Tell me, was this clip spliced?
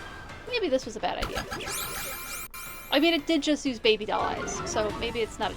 no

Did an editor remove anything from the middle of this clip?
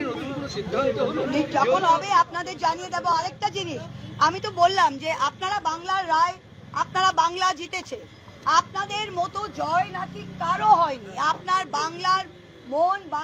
no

